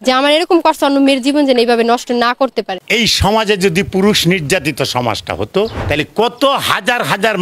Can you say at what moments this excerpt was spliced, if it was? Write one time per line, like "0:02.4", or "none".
0:02.8
0:05.8